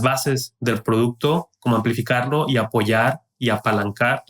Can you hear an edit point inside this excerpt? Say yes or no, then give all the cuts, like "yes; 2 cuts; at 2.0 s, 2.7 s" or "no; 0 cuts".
no; 0 cuts